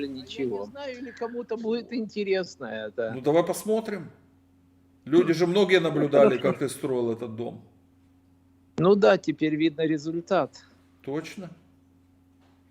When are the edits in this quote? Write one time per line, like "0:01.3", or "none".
0:01.1

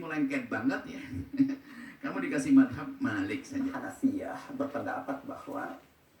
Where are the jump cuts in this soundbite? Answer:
0:03.7

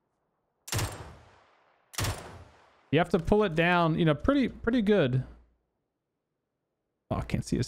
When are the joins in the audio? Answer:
none

